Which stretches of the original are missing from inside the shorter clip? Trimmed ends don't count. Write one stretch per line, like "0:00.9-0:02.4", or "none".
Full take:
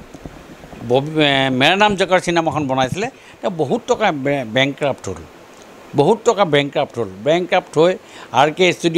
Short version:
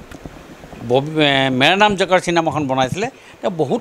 none